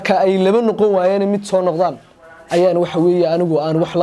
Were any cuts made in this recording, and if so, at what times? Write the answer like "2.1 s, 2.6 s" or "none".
none